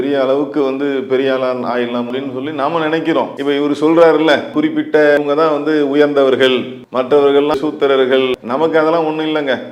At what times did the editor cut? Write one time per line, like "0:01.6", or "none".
none